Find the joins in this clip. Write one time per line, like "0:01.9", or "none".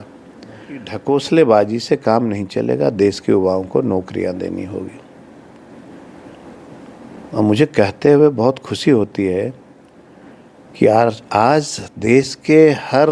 0:00.9